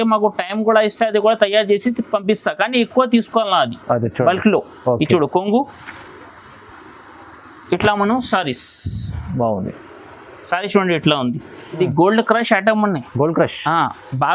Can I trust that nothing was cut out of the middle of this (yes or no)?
no